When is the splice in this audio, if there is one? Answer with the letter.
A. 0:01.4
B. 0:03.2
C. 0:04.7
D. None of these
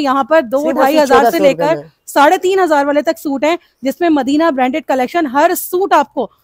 D